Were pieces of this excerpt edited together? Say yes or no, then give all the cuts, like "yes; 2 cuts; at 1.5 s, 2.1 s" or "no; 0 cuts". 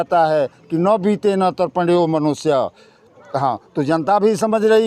no; 0 cuts